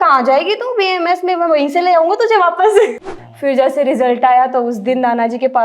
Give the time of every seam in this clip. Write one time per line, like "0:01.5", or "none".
0:03.0